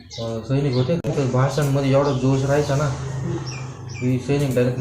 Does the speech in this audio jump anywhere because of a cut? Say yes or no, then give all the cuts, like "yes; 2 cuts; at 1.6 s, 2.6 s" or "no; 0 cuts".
yes; 1 cut; at 1.1 s